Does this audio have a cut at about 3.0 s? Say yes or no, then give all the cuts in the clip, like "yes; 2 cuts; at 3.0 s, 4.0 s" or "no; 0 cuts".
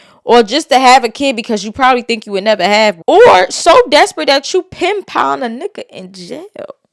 yes; 1 cut; at 3.0 s